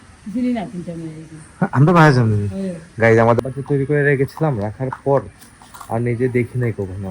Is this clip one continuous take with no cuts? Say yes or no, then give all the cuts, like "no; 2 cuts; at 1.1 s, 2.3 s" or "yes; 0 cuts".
no; 1 cut; at 3.4 s